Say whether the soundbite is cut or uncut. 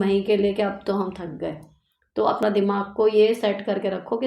cut